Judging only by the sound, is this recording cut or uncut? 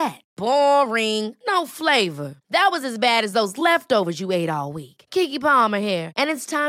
uncut